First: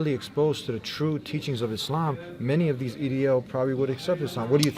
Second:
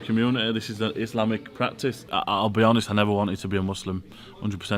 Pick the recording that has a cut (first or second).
second